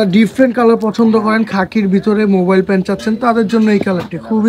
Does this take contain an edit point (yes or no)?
no